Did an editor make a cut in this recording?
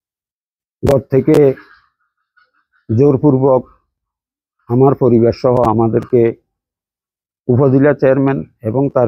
no; 0 cuts

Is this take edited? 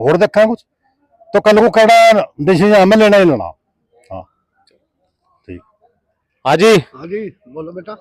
no; 0 cuts

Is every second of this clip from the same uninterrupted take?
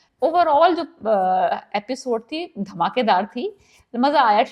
yes; 0 cuts

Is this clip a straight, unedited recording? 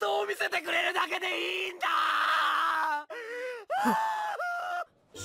no; 1 cut; at 1.5 s

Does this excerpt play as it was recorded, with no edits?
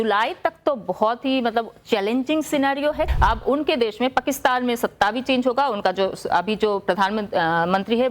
no; 1 cut; at 3.1 s

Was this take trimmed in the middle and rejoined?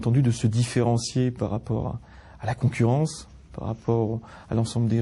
no; 0 cuts

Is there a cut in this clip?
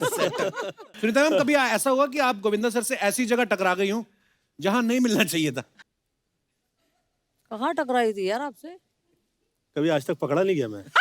yes; 2 cuts; at 0.8 s, 5.8 s

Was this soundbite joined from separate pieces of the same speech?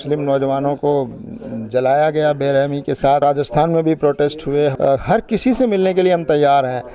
yes; 2 cuts; at 3.2 s, 4.7 s

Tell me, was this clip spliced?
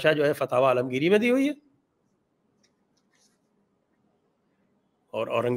no; 0 cuts

